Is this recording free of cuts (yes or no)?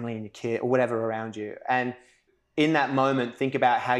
no